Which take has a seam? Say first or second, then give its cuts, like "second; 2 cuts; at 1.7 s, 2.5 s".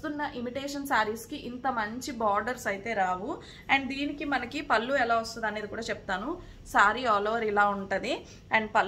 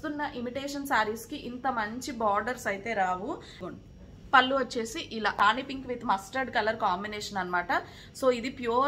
second; 2 cuts; at 3.6 s, 5.4 s